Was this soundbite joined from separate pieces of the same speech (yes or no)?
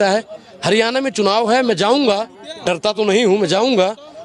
no